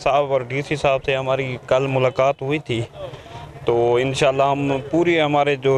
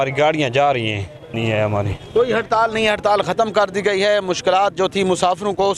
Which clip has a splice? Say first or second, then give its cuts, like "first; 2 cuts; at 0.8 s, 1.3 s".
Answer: second; 1 cut; at 1.4 s